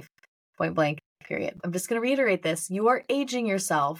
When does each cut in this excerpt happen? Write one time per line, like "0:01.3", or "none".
0:01.6